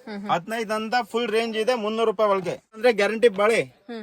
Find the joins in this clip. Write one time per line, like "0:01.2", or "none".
0:02.8